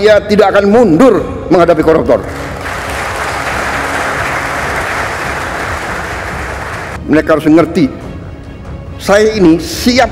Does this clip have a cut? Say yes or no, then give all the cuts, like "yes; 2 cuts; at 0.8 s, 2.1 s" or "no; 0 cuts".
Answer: yes; 1 cut; at 7.0 s